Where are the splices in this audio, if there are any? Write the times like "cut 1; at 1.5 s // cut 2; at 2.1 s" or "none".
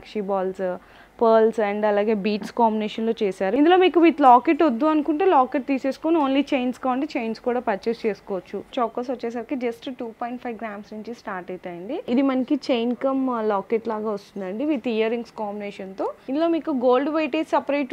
cut 1; at 3.5 s // cut 2; at 8.7 s // cut 3; at 12.0 s // cut 4; at 16.2 s